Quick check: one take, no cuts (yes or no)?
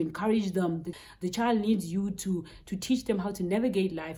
no